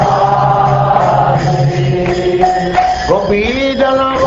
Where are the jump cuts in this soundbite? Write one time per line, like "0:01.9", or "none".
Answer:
0:02.0